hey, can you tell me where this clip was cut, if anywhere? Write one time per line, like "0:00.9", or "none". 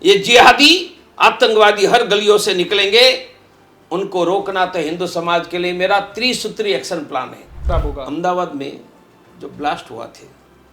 0:07.6